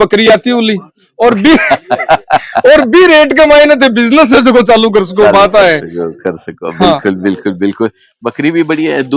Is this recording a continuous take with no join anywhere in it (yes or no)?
yes